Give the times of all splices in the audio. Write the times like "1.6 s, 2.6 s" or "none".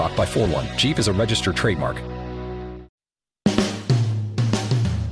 3.2 s